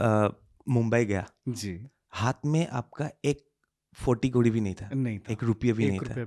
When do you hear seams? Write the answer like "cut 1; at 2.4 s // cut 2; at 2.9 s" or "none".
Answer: none